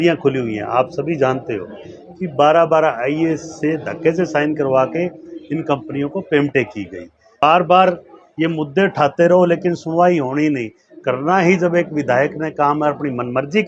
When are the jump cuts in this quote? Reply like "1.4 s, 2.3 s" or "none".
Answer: 7.4 s